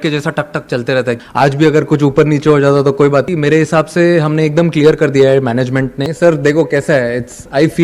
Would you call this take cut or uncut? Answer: cut